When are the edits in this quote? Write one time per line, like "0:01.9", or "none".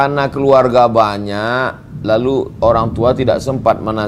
none

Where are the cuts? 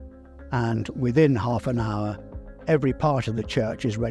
none

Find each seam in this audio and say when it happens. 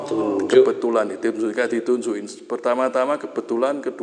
none

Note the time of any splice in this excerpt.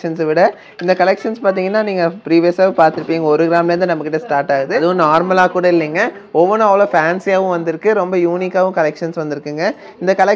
0:04.8

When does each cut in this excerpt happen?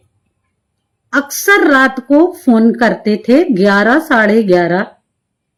none

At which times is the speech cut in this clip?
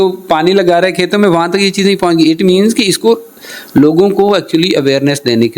none

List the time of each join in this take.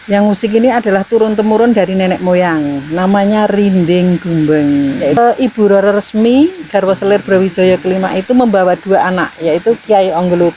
0:05.2

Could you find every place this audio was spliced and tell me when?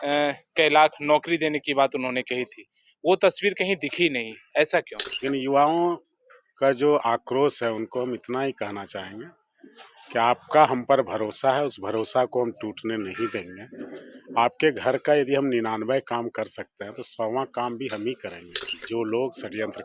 0:05.0
0:18.7

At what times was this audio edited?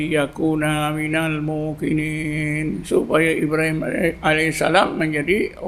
none

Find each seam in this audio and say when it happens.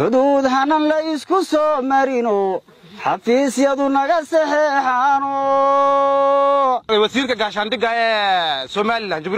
0:06.9

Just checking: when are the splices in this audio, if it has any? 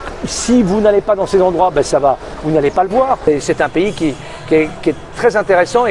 0:03.3

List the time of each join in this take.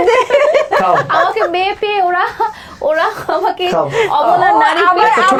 none

